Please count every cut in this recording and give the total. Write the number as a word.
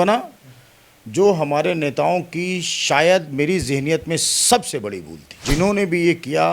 one